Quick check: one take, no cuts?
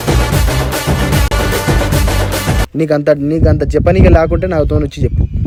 yes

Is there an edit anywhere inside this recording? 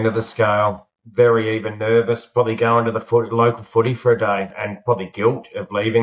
yes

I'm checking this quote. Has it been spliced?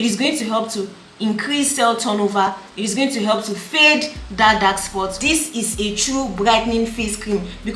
yes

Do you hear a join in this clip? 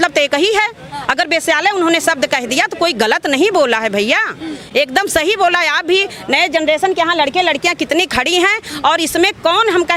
no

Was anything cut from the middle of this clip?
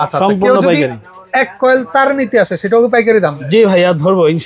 no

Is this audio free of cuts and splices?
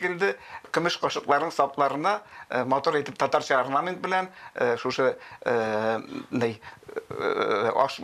yes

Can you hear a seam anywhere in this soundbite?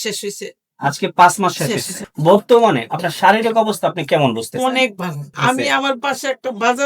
yes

